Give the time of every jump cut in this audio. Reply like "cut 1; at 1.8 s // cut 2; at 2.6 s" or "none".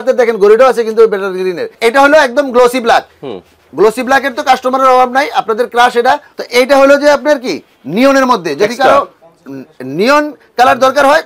cut 1; at 1.7 s // cut 2; at 6.3 s